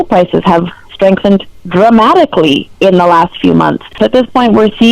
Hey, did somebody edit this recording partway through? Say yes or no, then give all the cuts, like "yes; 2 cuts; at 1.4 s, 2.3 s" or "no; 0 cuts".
yes; 1 cut; at 4.0 s